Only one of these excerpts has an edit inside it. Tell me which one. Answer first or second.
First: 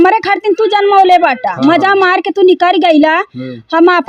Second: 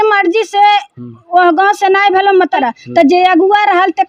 second